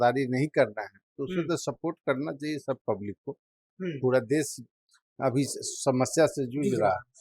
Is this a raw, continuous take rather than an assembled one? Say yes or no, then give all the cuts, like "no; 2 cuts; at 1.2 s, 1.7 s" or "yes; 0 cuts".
no; 1 cut; at 3.6 s